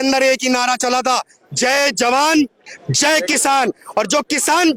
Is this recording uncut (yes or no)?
yes